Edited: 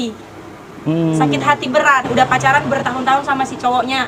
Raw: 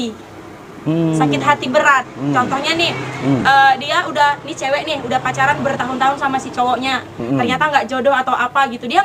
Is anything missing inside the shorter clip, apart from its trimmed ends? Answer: yes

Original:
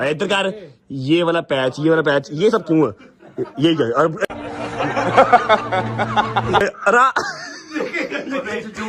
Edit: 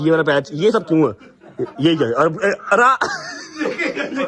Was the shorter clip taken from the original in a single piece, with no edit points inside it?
no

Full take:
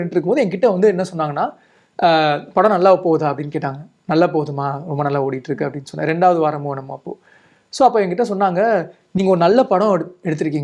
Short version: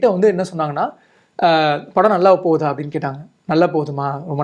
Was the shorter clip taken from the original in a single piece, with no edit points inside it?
yes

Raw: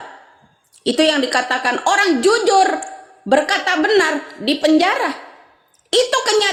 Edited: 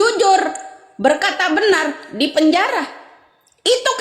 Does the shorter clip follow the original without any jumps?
yes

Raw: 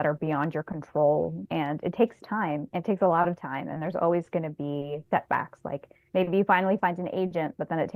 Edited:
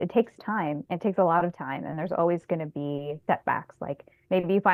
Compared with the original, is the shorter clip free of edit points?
yes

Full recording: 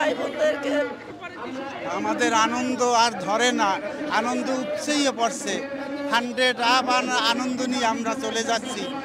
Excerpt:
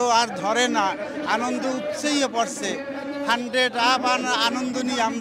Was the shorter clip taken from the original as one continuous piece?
yes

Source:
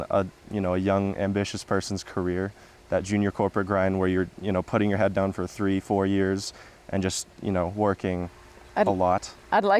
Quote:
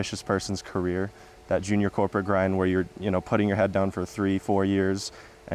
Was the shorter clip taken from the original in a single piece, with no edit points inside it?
yes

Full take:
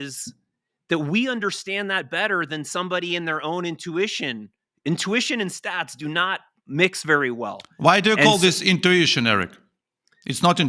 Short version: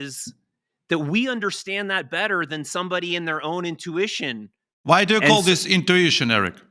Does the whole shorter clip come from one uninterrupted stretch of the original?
no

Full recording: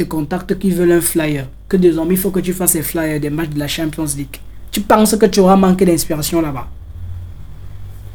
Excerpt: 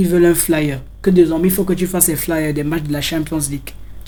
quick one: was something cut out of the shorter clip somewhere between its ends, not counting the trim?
no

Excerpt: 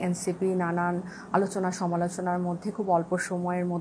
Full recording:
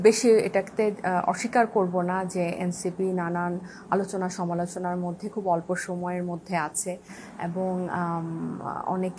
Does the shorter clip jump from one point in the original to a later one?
no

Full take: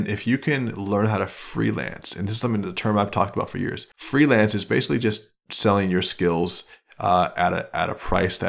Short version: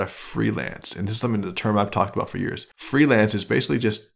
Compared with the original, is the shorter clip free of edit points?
yes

